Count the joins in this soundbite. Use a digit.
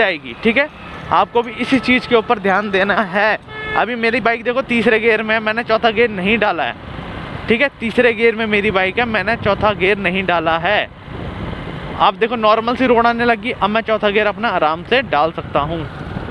0